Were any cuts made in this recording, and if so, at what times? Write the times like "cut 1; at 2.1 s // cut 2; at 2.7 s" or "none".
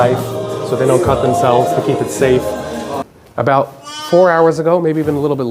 cut 1; at 3.0 s